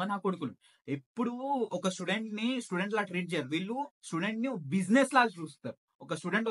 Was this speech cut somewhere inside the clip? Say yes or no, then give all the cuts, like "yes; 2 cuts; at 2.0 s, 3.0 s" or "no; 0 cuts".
no; 0 cuts